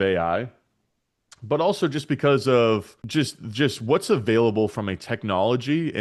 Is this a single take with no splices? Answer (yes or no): no